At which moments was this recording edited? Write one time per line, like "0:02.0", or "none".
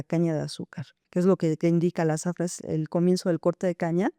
0:01.0